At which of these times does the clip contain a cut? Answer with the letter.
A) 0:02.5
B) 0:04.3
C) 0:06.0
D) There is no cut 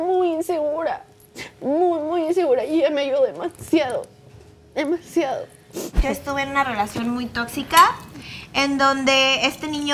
C